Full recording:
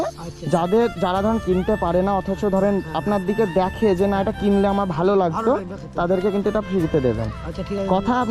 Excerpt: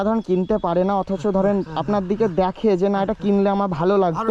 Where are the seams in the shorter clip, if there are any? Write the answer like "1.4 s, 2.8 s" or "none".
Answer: none